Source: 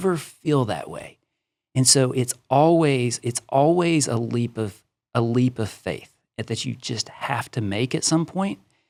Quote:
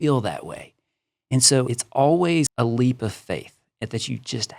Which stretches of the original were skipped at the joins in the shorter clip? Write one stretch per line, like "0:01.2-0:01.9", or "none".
0:02.1-0:03.2
0:04.1-0:05.1

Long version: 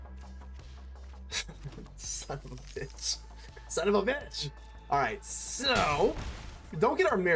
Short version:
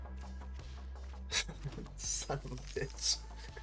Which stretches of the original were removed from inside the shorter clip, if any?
none

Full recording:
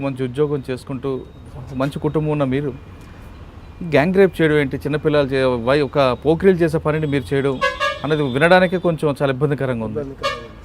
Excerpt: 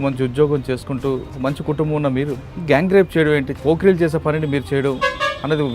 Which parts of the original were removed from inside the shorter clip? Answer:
0:01.3-0:01.7
0:02.8-0:03.7
0:04.8-0:06.2

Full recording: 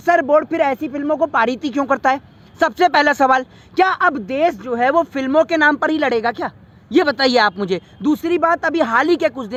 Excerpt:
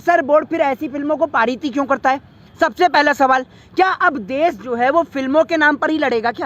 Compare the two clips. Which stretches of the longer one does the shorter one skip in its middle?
none

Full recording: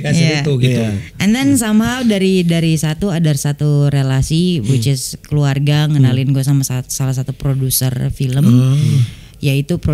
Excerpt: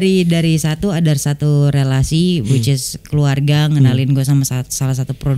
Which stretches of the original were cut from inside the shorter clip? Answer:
none

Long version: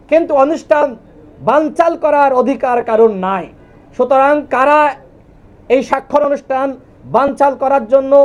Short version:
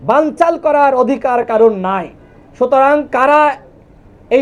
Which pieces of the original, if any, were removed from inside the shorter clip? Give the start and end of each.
none

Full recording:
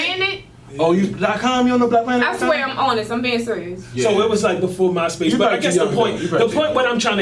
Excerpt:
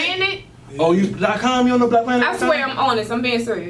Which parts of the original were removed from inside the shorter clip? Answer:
none

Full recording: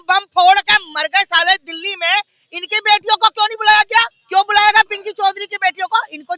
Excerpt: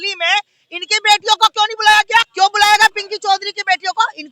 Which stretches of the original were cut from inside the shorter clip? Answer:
0:04.1-0:04.2

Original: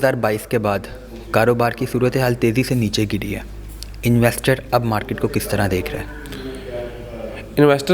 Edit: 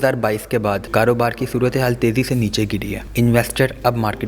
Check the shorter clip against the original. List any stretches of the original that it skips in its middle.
0:00.8-0:01.2
0:03.4-0:03.9

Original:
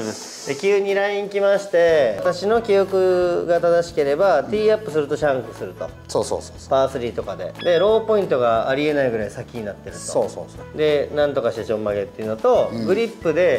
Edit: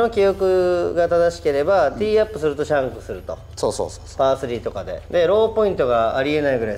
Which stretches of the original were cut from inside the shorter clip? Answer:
none

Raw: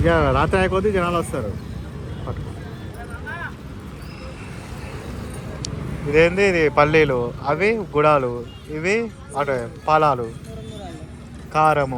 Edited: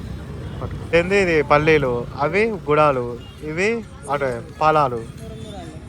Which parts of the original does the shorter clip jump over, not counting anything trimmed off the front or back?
0:02.6-0:06.2

